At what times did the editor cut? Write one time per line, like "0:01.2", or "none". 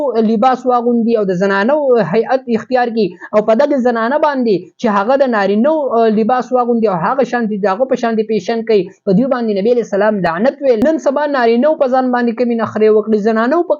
0:10.8